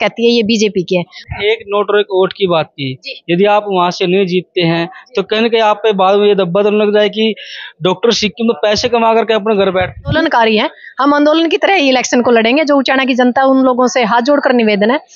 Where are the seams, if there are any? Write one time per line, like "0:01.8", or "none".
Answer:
0:01.2
0:10.2

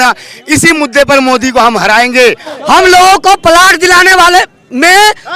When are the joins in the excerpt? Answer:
0:02.5

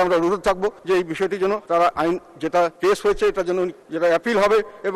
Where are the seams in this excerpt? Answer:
0:00.8
0:01.6
0:02.7
0:03.8

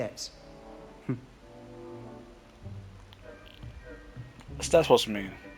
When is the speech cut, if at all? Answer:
none

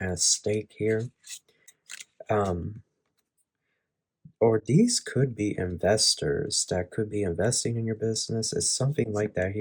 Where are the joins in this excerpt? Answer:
none

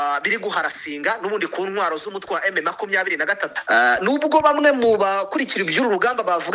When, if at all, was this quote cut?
0:03.5

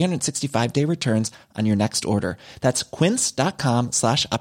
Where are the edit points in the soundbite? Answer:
none

